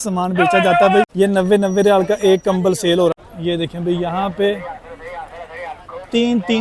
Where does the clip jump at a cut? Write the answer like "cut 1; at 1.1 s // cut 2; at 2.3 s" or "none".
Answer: cut 1; at 1.1 s // cut 2; at 3.2 s